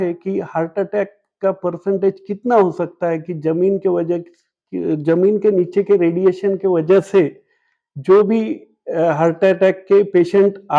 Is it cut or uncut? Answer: uncut